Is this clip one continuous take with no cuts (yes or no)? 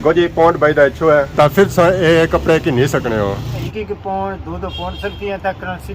no